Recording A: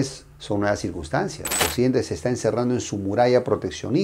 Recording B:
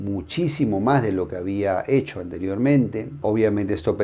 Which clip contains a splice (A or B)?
A